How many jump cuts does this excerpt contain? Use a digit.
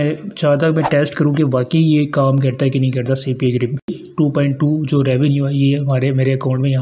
1